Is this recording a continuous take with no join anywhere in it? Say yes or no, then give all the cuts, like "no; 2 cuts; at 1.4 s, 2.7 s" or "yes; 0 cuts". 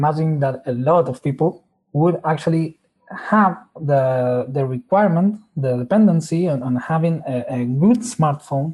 no; 1 cut; at 1.3 s